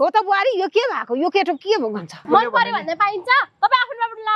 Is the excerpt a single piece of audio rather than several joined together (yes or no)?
no